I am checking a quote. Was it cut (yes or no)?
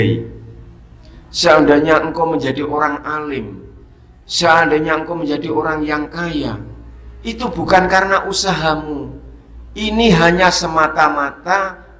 no